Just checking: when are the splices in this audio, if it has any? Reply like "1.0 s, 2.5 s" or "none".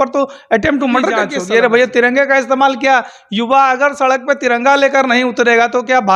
1.3 s